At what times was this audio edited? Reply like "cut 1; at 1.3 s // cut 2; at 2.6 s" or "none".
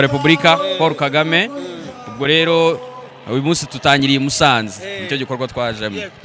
none

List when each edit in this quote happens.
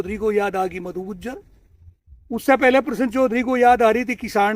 none

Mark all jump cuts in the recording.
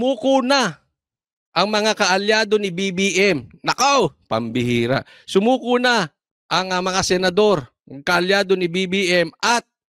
none

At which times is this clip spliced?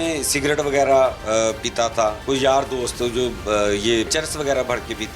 cut 1; at 2.2 s // cut 2; at 4.1 s

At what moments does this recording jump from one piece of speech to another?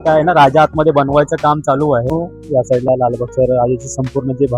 cut 1; at 2.1 s

